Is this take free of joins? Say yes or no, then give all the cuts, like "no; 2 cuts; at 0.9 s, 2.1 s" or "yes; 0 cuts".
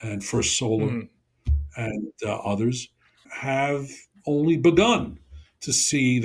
no; 1 cut; at 3.3 s